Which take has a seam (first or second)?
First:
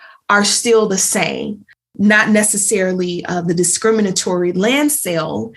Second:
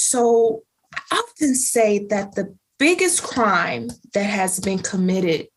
first